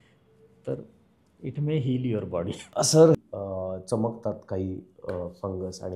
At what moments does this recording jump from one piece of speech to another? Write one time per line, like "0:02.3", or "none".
0:03.2

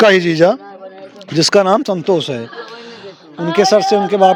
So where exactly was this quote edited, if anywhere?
none

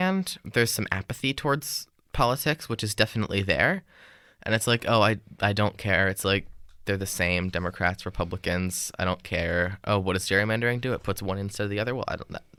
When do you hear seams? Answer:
none

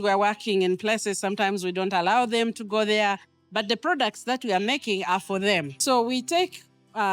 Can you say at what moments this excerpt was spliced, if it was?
0:05.7

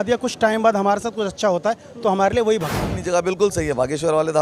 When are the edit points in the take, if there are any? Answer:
0:03.0

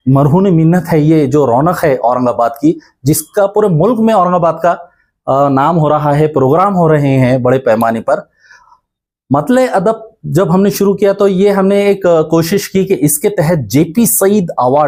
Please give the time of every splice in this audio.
none

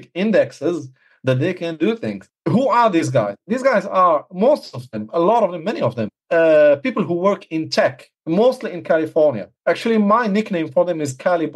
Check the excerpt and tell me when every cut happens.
0:02.3
0:06.1
0:08.1
0:09.5

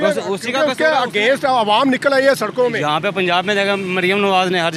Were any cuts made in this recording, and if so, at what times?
none

